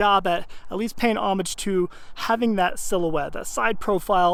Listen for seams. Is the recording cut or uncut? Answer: uncut